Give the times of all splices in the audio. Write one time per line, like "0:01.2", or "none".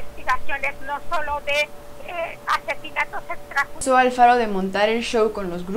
0:03.8